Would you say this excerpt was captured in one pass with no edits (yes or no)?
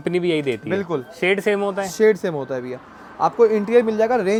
yes